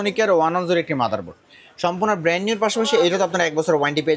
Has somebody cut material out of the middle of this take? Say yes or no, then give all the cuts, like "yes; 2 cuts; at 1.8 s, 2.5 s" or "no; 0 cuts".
no; 0 cuts